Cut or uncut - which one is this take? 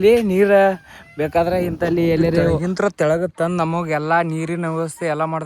cut